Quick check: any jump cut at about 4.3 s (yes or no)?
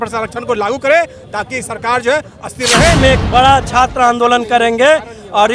no